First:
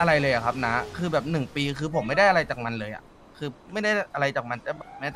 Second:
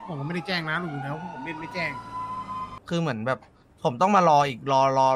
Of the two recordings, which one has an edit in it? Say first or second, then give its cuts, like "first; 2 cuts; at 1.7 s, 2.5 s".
second; 1 cut; at 2.8 s